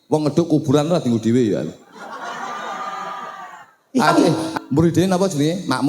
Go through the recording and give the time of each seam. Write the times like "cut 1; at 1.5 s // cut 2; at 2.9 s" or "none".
cut 1; at 4.4 s